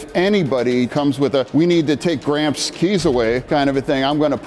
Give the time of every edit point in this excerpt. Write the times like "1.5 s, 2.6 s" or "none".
1.2 s, 3.4 s

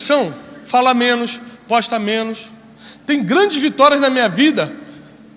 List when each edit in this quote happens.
none

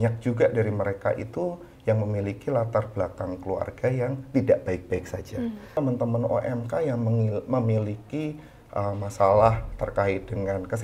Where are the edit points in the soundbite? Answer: 5.8 s

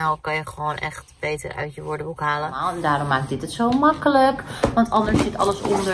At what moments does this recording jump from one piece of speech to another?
2.7 s

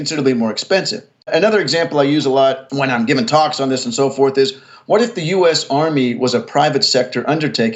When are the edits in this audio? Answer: 1.3 s, 2.6 s

